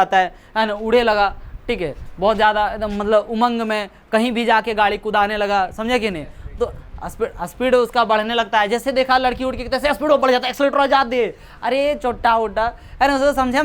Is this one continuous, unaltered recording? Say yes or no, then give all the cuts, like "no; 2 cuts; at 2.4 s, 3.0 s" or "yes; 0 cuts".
yes; 0 cuts